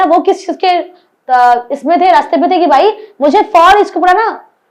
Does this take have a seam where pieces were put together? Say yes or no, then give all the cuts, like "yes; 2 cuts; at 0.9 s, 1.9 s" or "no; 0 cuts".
no; 0 cuts